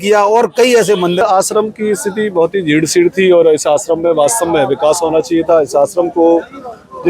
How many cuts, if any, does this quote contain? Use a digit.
1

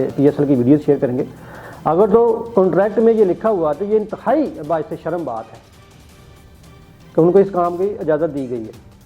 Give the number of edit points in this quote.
0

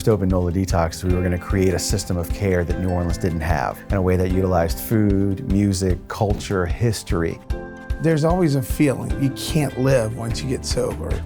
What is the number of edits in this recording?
2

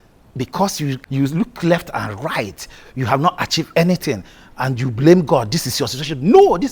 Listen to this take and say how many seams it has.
1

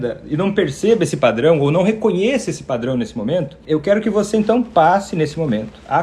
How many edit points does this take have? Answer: 1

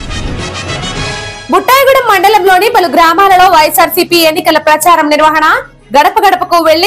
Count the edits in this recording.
1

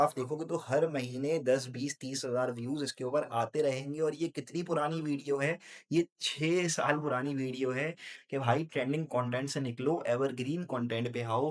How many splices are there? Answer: 1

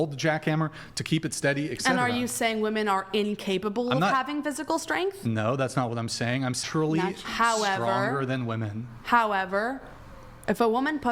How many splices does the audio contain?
1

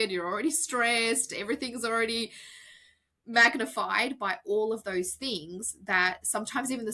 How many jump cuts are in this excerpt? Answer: 0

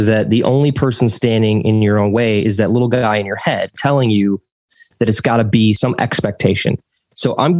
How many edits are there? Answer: 1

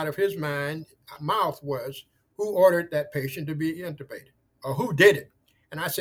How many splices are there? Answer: 0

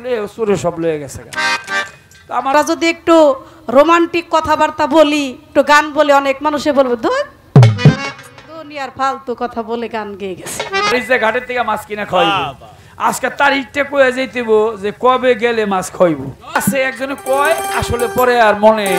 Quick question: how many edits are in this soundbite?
3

